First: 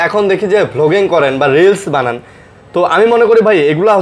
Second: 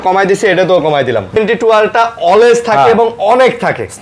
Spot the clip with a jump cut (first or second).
second